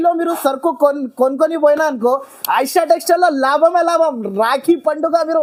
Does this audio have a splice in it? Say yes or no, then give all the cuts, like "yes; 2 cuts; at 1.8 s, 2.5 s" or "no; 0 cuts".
no; 0 cuts